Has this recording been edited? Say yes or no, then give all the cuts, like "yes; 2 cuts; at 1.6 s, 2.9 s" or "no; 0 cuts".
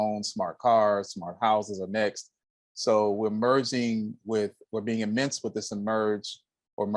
no; 0 cuts